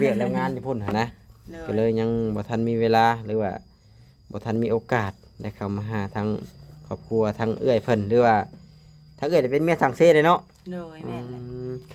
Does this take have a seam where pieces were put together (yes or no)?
no